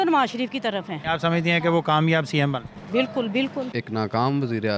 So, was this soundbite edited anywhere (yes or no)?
yes